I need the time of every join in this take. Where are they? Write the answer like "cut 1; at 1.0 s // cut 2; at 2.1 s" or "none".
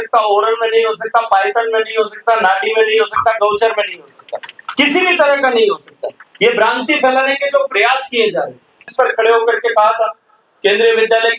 cut 1; at 8.8 s